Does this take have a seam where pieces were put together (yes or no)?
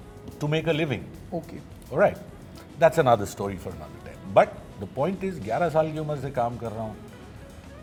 no